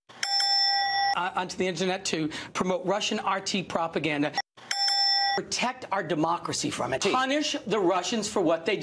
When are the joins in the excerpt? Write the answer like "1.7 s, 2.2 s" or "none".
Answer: none